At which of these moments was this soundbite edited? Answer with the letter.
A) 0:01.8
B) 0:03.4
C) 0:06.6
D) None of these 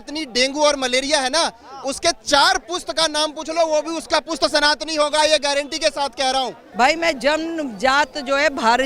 C